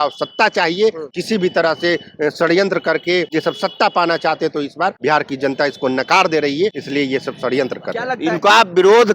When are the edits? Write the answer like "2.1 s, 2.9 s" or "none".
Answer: 1.1 s, 3.3 s, 5.0 s, 6.8 s, 8.1 s